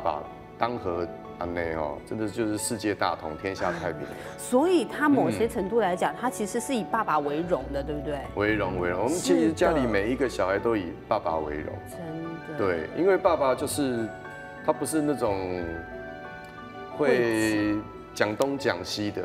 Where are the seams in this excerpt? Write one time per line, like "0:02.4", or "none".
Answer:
none